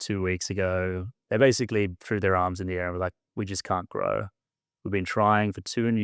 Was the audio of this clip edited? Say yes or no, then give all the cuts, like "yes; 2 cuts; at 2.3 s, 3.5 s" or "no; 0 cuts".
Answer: yes; 1 cut; at 1.1 s